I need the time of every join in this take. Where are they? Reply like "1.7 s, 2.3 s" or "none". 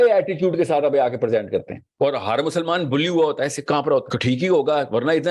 1.8 s, 4.1 s